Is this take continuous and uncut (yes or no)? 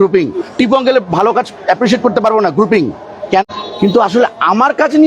no